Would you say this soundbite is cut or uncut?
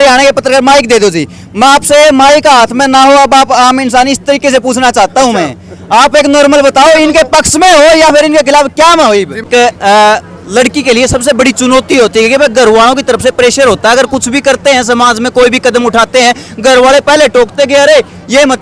cut